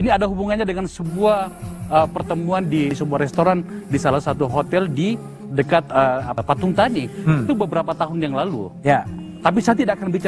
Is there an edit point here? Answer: yes; 2 cuts; at 2.9 s, 6.4 s

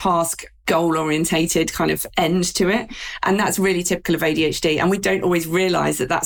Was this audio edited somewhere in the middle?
yes; 1 cut; at 5.0 s

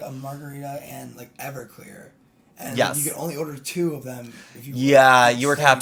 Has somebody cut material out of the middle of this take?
no; 0 cuts

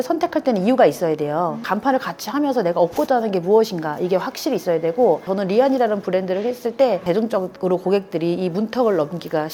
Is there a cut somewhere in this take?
no; 0 cuts

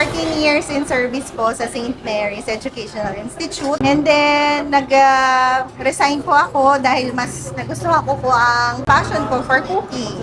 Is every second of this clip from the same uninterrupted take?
no; 1 cut; at 8.8 s

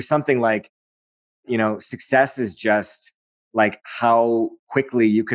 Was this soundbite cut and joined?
no; 0 cuts

